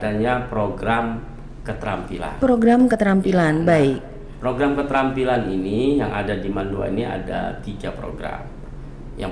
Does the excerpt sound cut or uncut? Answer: uncut